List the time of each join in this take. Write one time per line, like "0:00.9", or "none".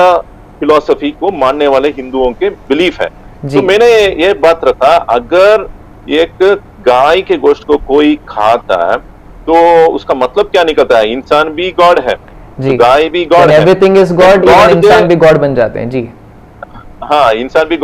none